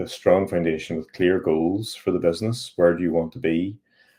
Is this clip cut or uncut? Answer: uncut